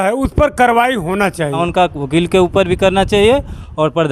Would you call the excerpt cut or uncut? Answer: cut